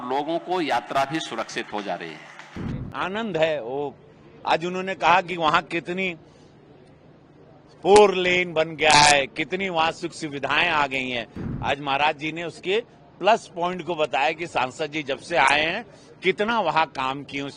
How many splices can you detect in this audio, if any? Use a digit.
2